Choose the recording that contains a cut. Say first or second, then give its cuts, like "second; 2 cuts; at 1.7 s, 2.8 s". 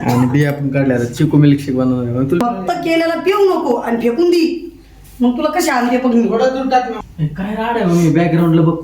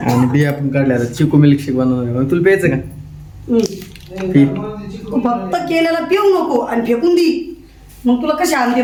first; 2 cuts; at 2.4 s, 7.0 s